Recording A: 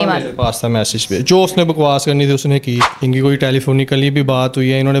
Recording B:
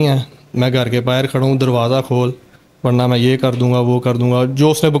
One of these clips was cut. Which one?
A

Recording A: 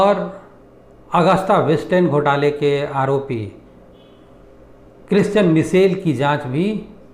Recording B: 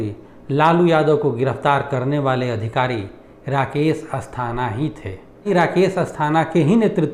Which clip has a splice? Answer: B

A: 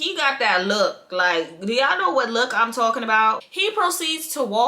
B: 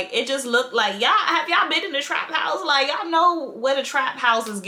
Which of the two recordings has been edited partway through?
A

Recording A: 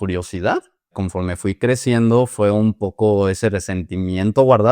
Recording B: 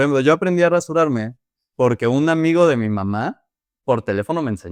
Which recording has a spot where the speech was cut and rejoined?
A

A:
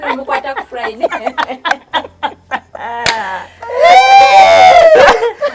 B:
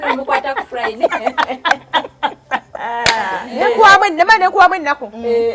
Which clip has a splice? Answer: B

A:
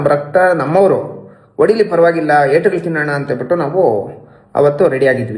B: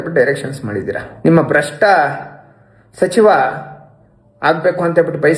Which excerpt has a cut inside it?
B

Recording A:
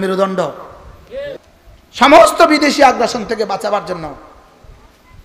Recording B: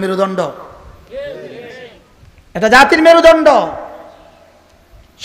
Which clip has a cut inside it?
A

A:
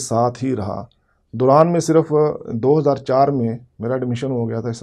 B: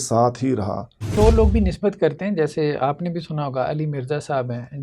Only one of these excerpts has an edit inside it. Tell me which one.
B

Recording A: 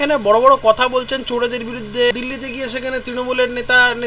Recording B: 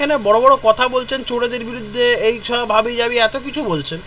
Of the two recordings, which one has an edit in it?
A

